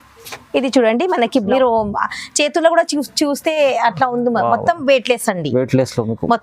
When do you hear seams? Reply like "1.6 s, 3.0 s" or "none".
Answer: 1.5 s